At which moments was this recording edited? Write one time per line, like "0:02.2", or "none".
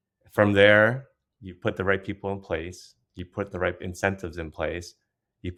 none